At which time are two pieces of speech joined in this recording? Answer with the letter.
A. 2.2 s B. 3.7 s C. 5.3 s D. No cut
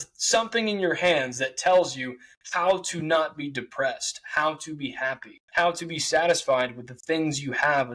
C